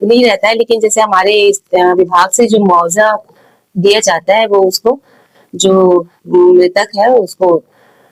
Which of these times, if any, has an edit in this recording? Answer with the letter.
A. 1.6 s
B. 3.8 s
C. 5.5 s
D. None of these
D